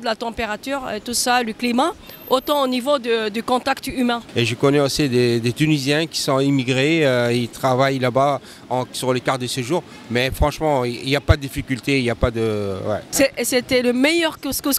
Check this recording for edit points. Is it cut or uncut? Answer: cut